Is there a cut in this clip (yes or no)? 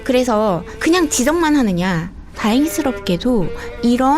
yes